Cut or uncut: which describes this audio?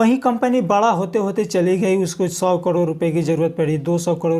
uncut